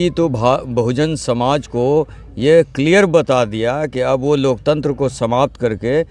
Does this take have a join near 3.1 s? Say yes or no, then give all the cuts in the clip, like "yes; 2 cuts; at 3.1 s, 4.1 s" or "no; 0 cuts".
no; 0 cuts